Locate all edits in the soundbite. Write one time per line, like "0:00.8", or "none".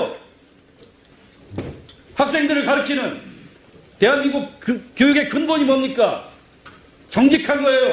none